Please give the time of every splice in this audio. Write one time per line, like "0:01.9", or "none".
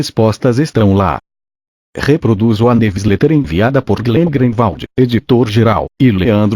0:01.8